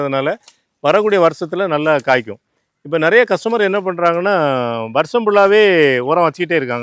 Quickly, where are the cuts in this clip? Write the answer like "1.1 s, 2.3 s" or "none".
none